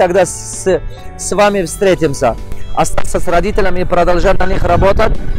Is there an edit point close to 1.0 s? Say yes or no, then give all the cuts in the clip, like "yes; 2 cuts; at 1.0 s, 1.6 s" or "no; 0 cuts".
no; 1 cut; at 2.5 s